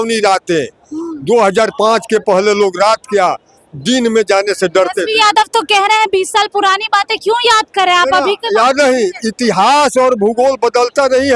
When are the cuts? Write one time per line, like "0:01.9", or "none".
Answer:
none